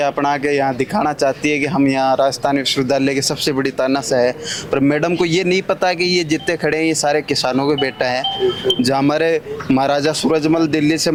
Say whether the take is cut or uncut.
uncut